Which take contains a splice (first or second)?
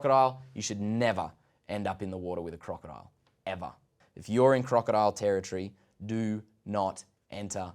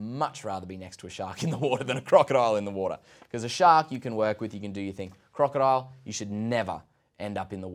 first